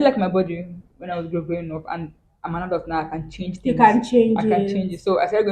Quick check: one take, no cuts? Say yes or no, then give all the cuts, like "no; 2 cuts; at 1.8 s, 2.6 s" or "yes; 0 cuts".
yes; 0 cuts